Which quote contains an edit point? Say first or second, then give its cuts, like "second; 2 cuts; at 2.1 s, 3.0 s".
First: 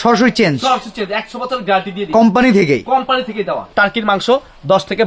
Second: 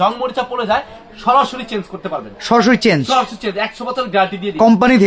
first; 1 cut; at 3.6 s